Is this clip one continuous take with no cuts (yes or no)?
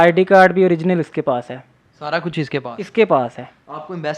yes